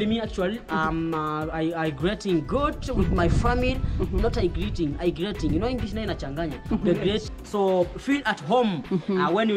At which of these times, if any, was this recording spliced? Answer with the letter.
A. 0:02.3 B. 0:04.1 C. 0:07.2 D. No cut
C